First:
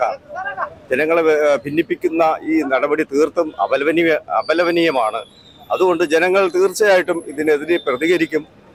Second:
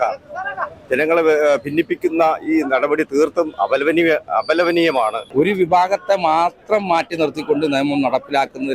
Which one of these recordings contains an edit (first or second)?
second